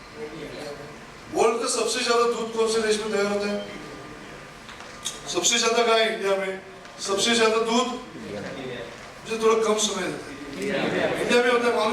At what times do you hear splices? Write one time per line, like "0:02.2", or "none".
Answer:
none